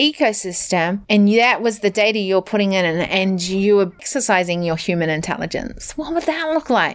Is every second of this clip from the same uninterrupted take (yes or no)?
no